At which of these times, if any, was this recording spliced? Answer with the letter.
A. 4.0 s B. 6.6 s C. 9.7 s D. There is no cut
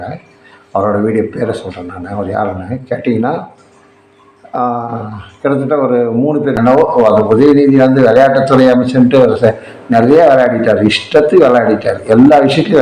B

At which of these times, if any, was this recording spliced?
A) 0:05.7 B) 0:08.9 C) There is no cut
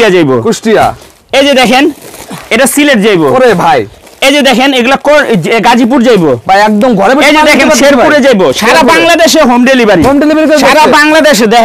C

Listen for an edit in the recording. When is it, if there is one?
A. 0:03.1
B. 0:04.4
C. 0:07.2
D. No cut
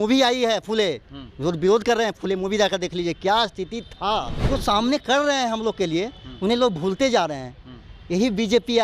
B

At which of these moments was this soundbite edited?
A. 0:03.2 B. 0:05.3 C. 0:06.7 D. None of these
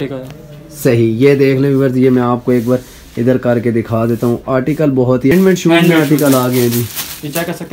B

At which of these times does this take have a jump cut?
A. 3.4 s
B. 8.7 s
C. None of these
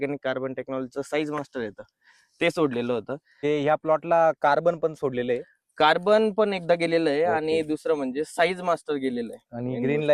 A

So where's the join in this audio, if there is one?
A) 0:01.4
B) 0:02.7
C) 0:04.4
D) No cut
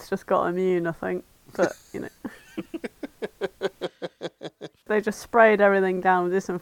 C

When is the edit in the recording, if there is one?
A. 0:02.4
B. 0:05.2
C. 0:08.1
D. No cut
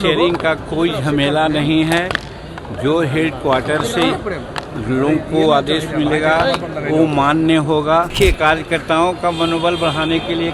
C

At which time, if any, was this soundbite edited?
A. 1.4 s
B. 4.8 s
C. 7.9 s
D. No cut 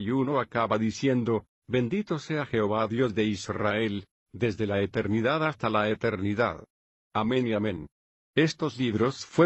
A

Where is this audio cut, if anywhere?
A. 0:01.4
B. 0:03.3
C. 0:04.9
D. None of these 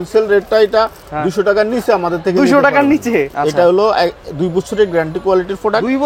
B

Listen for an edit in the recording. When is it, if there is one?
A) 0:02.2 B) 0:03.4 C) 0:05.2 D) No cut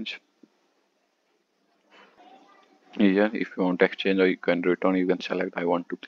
A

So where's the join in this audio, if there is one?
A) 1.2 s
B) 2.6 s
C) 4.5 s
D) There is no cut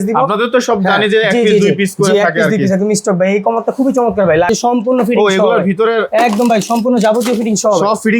C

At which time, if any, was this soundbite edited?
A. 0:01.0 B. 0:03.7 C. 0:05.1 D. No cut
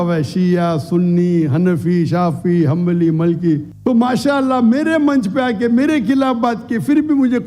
B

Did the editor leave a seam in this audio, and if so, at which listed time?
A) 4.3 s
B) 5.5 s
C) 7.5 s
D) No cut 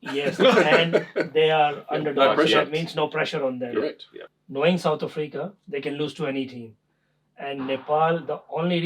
A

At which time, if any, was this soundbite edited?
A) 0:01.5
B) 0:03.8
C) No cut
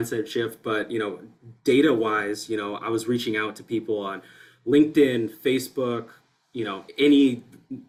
C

